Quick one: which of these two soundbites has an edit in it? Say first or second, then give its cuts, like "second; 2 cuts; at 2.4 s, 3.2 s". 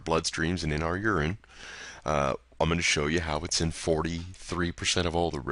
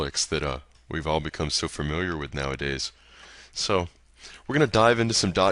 first; 1 cut; at 1.0 s